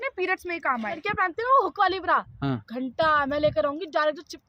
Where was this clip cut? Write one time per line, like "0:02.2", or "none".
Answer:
0:01.0